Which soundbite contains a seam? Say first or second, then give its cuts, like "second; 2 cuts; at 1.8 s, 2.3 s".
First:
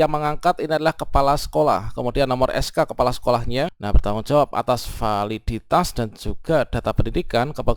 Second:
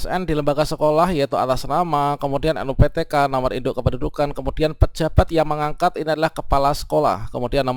first; 1 cut; at 3.8 s